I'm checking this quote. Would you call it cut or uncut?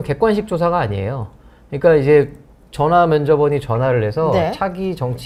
uncut